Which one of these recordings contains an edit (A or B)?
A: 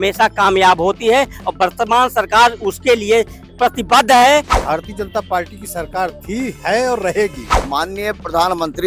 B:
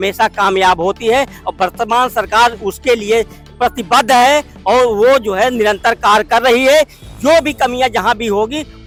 A